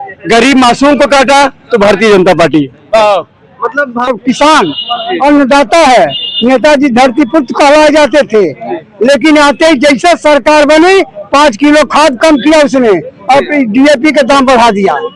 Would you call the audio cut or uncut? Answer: cut